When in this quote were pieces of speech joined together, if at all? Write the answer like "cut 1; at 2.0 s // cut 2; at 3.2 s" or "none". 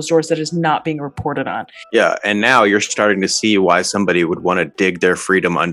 cut 1; at 1.8 s